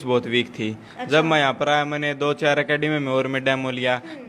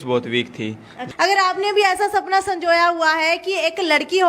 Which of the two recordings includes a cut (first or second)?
second